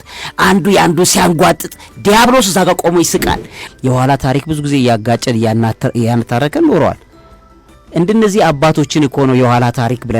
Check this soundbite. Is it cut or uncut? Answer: cut